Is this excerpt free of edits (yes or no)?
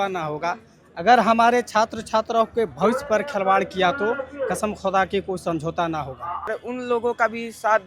no